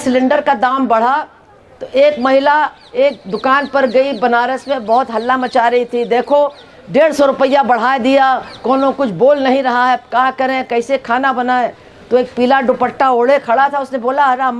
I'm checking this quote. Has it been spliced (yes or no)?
no